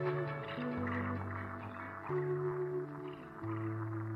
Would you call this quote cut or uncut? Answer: uncut